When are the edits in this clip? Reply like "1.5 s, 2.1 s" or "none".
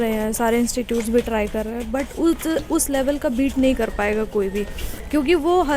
none